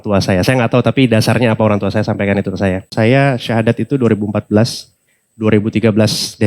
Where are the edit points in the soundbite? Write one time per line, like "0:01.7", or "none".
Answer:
0:02.9